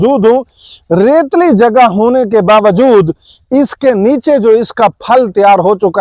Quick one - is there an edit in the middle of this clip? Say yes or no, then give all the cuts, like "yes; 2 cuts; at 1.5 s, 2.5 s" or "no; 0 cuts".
no; 0 cuts